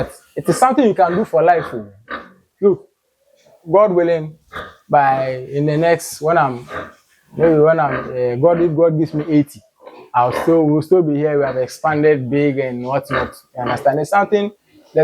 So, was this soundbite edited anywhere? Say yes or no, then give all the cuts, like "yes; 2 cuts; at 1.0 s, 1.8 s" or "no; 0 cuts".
no; 0 cuts